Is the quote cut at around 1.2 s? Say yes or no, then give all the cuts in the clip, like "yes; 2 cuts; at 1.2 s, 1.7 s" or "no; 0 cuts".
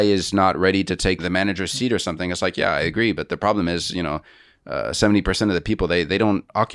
yes; 1 cut; at 1.2 s